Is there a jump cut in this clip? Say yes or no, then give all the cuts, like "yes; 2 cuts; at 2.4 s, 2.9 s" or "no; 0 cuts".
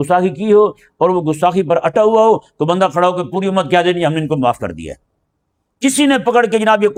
no; 0 cuts